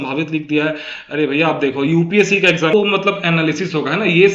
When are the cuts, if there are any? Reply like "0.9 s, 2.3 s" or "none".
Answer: 2.7 s